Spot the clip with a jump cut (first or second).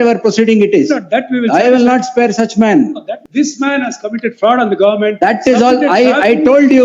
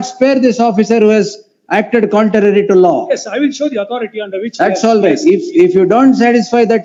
first